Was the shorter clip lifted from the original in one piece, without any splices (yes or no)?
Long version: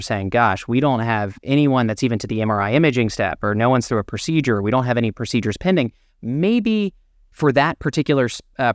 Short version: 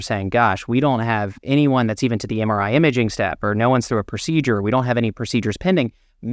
yes